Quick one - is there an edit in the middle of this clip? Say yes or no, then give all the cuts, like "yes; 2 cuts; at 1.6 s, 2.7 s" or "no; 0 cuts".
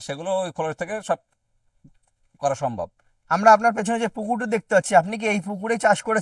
no; 0 cuts